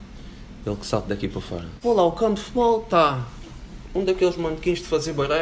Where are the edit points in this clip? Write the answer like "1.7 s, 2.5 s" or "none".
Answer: 1.6 s